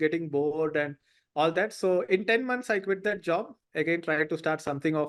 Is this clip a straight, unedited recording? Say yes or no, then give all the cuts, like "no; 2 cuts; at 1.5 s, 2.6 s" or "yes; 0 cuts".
yes; 0 cuts